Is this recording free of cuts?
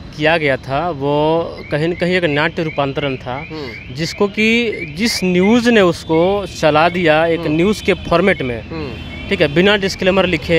yes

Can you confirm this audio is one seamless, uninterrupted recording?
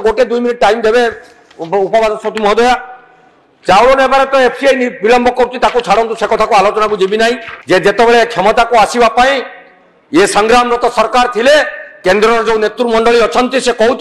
no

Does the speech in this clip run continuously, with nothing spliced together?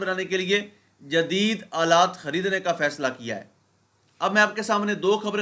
yes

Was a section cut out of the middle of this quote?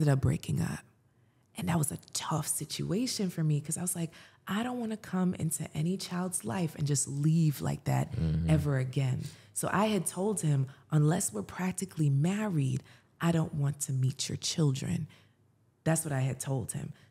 no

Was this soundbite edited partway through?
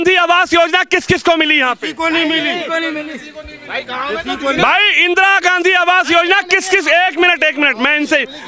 no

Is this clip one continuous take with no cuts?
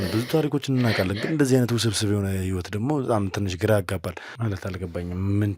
no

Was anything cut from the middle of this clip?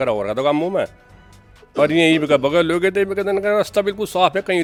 no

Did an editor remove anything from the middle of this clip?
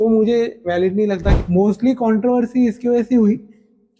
yes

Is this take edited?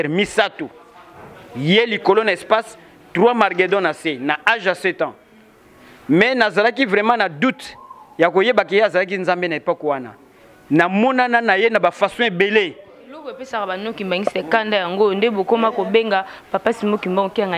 no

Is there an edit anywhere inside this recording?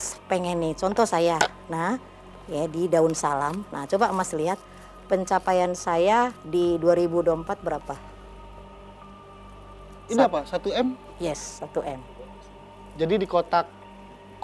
no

